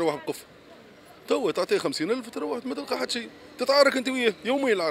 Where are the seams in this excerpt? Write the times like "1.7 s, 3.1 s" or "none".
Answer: none